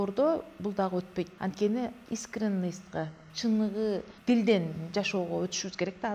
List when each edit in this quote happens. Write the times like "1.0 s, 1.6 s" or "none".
1.3 s, 2.0 s, 4.1 s